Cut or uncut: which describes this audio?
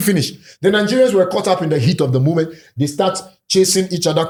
uncut